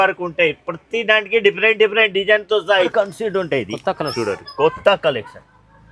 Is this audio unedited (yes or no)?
no